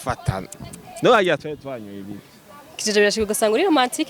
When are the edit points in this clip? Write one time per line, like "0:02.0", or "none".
none